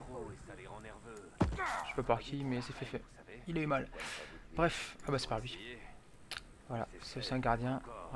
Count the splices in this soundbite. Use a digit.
1